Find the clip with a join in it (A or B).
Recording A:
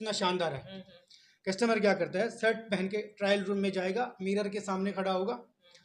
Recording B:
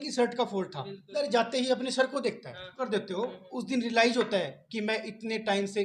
B